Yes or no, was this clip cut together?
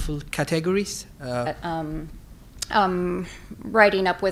no